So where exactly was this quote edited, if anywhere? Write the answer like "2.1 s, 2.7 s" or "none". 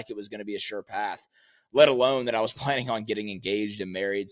none